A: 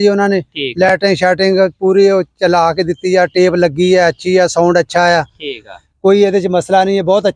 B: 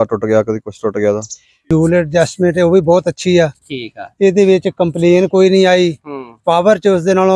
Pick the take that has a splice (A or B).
B